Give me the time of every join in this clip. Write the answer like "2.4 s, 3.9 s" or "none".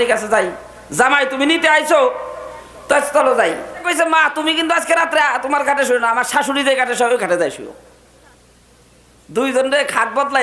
3.7 s